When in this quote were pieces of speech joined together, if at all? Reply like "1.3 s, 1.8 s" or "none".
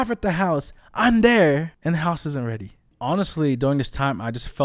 2.9 s